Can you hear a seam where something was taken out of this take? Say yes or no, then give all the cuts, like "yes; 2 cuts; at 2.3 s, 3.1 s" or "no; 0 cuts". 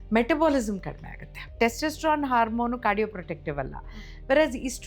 yes; 1 cut; at 1.5 s